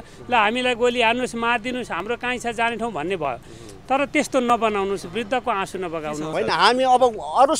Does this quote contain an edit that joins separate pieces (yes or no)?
yes